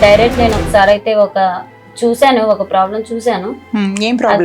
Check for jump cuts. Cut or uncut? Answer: uncut